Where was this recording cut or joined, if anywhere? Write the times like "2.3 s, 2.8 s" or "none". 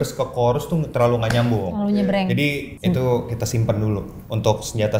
2.7 s